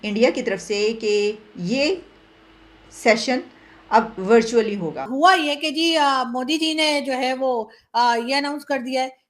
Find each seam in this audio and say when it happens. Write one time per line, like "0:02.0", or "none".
0:05.1